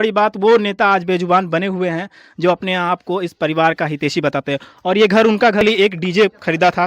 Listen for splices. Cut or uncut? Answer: cut